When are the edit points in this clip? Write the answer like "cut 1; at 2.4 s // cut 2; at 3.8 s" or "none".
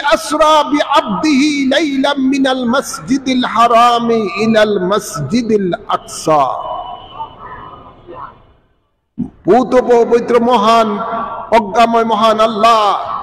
none